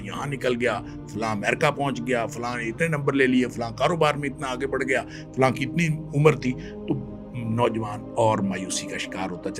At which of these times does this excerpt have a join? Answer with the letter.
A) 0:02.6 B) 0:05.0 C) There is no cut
C